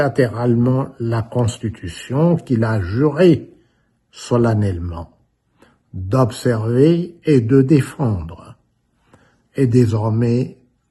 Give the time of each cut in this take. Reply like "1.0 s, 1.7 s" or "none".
none